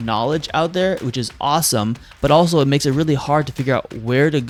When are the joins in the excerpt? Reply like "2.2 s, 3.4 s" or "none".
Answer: none